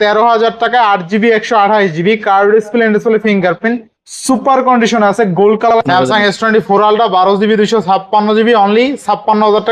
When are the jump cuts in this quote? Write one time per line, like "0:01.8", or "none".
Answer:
0:05.7